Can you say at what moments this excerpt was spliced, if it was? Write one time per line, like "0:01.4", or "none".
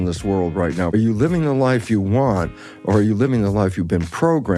0:00.9